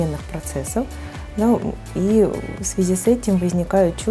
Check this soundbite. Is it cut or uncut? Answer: uncut